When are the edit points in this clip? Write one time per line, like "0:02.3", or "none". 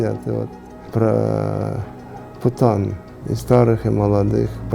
0:00.9